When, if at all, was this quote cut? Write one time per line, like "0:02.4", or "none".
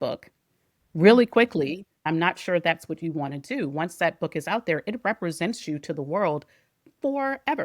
0:02.0